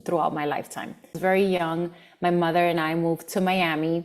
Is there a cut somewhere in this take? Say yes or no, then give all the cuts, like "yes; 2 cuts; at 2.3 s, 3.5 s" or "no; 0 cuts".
yes; 1 cut; at 1.2 s